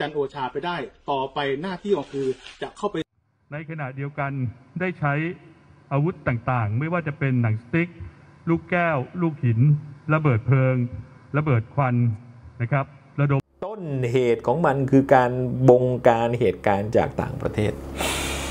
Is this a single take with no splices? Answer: no; 2 cuts; at 3.1 s, 13.8 s

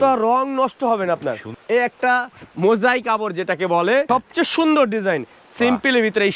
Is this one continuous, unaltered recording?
no; 2 cuts; at 1.5 s, 4.1 s

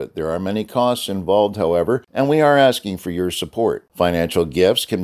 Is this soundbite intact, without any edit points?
no; 1 cut; at 2.1 s

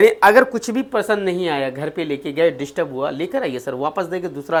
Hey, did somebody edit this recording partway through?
no; 0 cuts

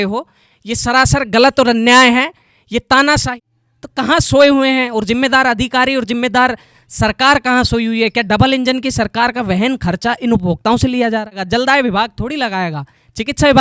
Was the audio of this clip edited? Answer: yes; 2 cuts; at 3.3 s, 11.4 s

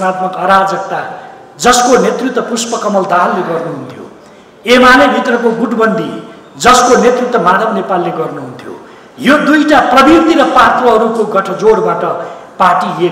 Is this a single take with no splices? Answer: yes; 0 cuts

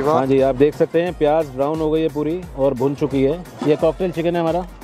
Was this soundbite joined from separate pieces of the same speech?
yes; 1 cut; at 3.6 s

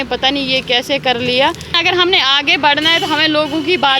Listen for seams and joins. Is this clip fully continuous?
no; 1 cut; at 1.8 s

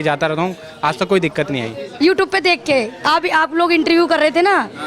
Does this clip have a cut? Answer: yes; 1 cut; at 1.8 s

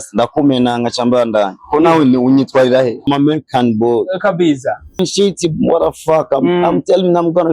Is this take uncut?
no; 2 cuts; at 3.1 s, 5.0 s

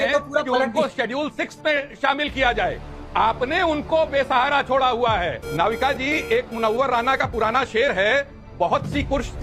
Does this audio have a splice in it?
yes; 1 cut; at 5.4 s

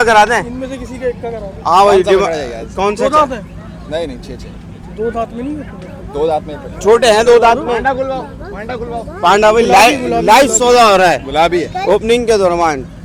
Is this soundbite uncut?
yes; 0 cuts

